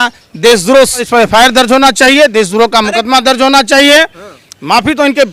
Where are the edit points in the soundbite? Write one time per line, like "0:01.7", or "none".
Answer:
0:01.1